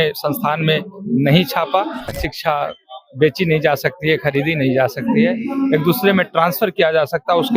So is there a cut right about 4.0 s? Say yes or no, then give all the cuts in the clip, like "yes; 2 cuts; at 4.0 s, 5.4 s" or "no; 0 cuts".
no; 1 cut; at 2.1 s